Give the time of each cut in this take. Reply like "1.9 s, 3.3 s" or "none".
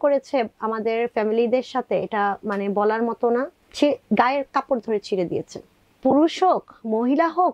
3.6 s, 5.8 s